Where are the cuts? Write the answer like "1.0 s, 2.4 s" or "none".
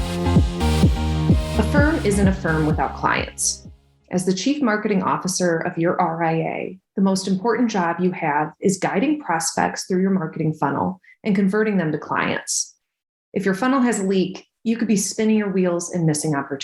1.7 s